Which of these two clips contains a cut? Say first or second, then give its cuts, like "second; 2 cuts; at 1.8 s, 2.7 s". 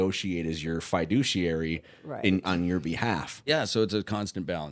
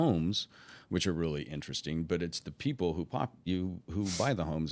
first; 1 cut; at 3.4 s